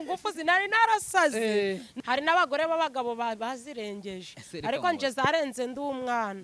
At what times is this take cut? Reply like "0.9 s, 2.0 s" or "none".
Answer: 1.9 s